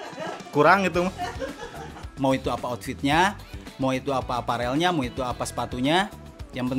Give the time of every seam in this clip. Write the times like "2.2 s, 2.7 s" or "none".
2.0 s